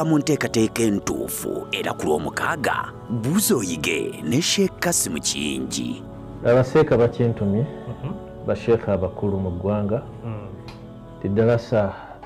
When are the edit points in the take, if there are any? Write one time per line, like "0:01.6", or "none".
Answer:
none

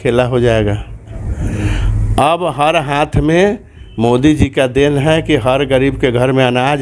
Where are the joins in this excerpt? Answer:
0:01.2

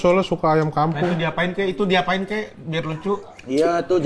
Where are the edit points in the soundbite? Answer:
none

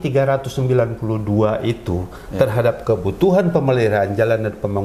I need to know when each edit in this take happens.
none

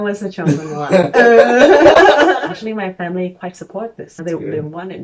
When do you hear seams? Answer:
0:02.4
0:04.1

